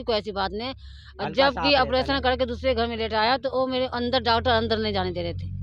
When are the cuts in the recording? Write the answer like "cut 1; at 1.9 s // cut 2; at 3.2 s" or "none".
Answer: none